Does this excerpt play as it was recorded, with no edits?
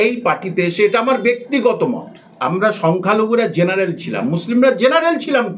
yes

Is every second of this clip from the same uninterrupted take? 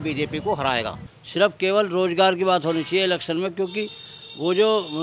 no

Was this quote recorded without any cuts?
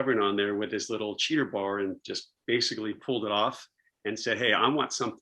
yes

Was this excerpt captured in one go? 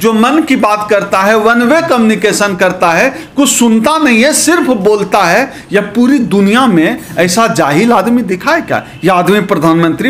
yes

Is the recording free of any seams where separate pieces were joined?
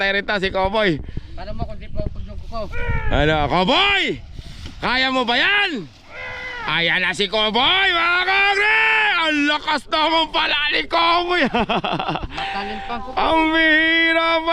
no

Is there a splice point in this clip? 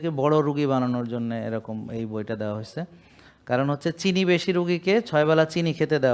no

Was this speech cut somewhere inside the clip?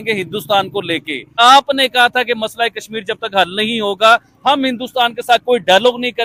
yes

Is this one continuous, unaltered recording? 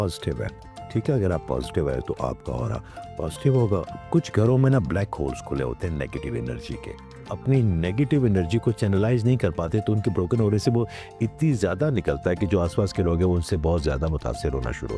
no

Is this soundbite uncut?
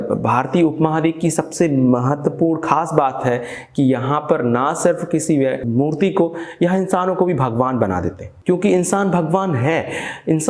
no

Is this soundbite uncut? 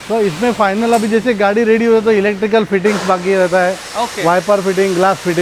yes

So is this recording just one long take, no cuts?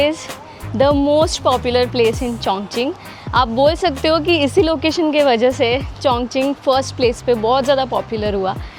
yes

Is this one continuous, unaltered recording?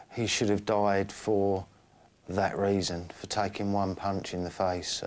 yes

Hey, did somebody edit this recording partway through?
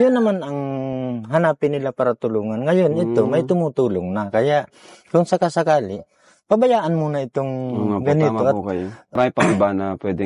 yes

